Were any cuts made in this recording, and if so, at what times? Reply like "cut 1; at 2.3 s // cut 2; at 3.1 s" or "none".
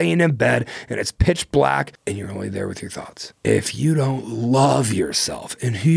cut 1; at 1.9 s // cut 2; at 3.2 s